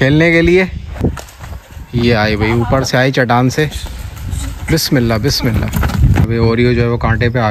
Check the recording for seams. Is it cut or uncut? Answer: cut